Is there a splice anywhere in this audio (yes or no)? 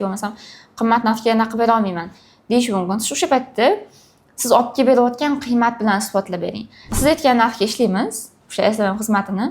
yes